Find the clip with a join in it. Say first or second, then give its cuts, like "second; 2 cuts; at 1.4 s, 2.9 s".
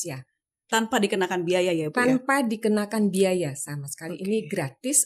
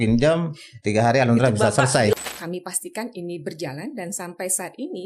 second; 1 cut; at 2.1 s